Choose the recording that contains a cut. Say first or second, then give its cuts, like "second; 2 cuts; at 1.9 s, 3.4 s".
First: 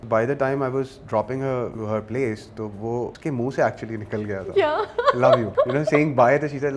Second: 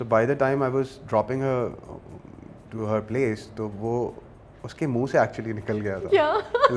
first; 3 cuts; at 1.7 s, 3.1 s, 5.5 s